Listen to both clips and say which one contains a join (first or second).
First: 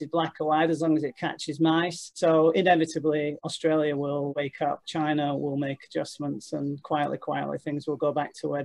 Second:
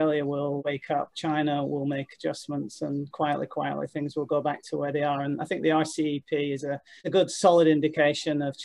first